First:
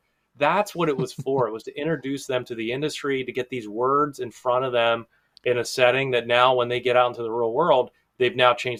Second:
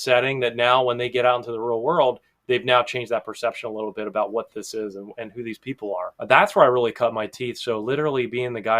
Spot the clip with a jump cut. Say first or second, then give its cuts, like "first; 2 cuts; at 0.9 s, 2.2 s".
second; 1 cut; at 6.1 s